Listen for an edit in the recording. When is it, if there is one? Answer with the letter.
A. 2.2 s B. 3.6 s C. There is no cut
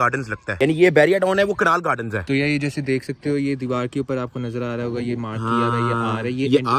A